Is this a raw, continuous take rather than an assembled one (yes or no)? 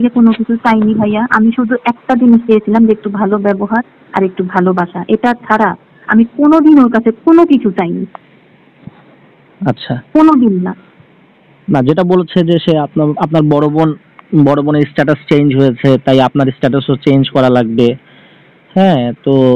yes